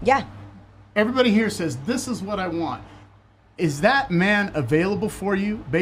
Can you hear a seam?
no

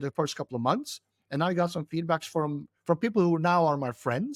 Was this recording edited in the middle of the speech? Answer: no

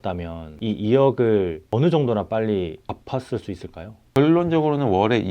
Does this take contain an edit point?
yes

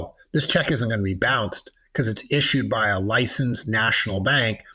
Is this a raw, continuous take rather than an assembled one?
yes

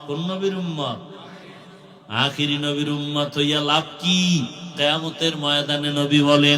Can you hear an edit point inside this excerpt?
no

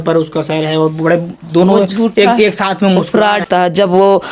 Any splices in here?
yes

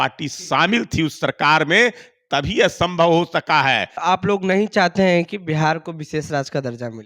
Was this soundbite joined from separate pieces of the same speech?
yes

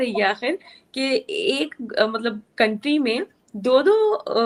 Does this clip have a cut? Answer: no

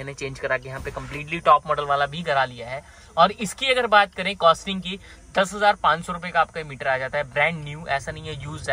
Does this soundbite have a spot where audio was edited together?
no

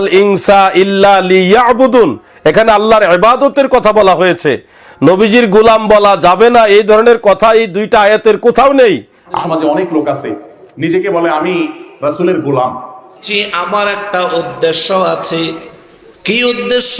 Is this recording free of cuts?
no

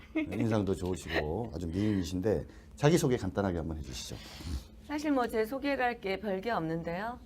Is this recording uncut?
no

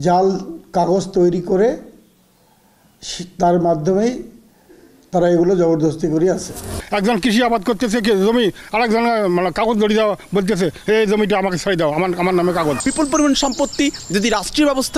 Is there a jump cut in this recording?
yes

